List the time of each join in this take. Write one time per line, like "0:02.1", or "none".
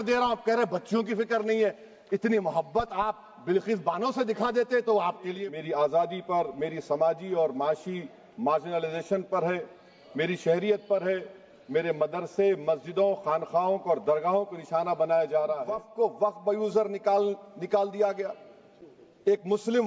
0:05.3
0:15.8